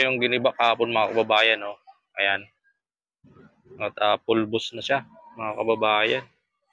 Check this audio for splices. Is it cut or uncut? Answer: uncut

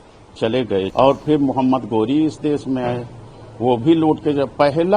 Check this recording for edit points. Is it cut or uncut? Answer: cut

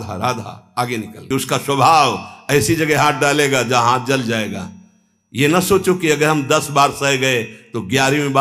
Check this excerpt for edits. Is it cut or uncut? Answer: cut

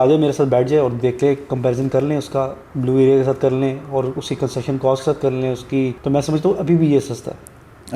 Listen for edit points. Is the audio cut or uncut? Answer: cut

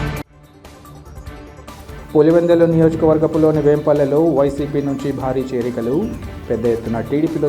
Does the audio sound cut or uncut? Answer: cut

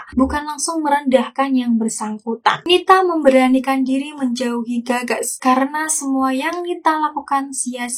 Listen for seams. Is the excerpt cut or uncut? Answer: cut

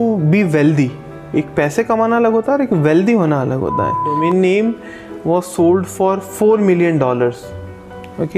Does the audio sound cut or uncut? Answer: cut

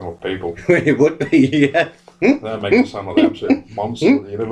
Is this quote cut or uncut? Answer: uncut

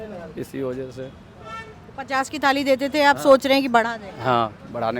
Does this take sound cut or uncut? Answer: uncut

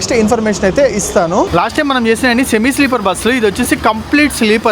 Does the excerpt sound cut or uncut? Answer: cut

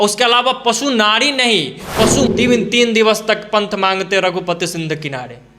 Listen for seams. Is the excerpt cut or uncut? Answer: cut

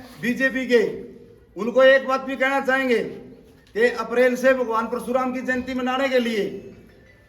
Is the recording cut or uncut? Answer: uncut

